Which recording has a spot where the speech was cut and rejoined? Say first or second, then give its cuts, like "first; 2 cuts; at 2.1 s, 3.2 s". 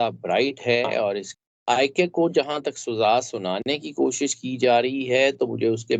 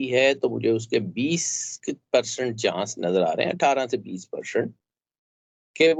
first; 1 cut; at 1.3 s